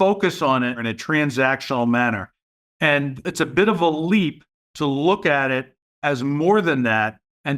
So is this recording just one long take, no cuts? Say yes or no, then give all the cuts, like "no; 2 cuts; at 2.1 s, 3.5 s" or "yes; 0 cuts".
no; 2 cuts; at 0.9 s, 3.2 s